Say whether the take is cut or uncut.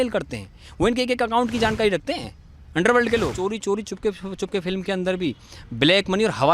cut